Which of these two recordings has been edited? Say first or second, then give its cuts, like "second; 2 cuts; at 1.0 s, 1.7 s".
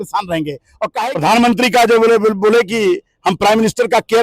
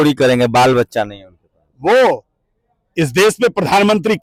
first; 1 cut; at 0.9 s